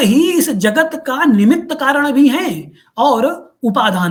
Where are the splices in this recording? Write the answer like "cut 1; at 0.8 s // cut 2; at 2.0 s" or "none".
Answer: none